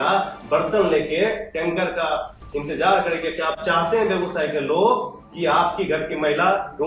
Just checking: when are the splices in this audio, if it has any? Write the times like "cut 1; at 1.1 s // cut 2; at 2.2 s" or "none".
none